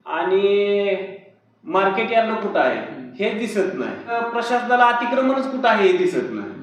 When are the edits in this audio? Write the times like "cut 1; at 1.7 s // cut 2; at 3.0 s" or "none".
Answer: cut 1; at 4.1 s